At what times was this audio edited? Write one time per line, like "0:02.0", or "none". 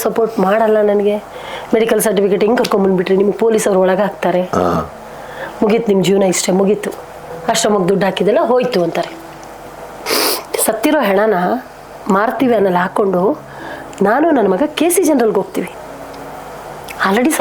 0:09.9
0:15.8